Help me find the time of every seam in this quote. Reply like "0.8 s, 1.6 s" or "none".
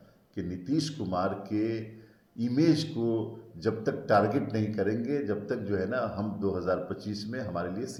none